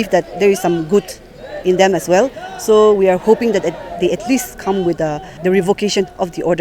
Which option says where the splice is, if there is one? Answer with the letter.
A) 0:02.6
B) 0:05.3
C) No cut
B